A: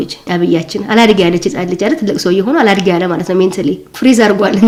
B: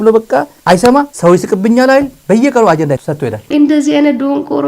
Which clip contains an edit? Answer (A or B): B